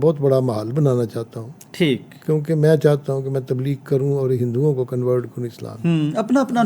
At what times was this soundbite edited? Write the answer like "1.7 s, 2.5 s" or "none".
none